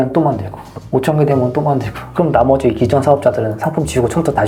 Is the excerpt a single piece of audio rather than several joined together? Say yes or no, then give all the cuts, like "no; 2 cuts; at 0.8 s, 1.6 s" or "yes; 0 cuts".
yes; 0 cuts